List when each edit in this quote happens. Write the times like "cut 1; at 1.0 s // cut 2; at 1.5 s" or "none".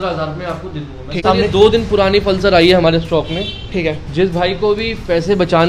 cut 1; at 1.1 s